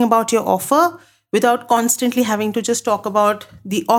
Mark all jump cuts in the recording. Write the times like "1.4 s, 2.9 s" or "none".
none